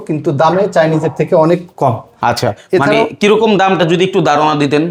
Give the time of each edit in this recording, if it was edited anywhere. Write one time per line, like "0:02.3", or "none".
none